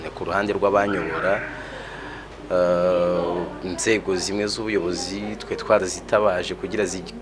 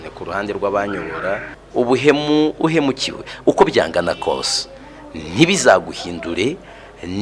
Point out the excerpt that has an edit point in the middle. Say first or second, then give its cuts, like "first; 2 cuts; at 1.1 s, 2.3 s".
second; 1 cut; at 1.6 s